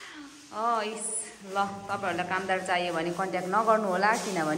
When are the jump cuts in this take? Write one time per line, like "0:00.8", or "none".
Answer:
none